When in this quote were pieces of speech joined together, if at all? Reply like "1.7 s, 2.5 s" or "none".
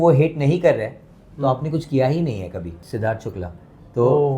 2.8 s